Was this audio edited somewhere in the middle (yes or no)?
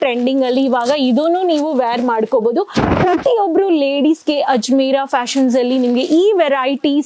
no